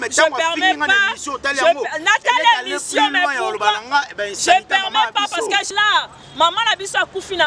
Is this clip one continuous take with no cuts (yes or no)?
no